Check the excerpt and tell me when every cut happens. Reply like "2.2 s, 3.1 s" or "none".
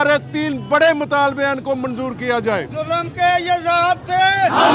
2.7 s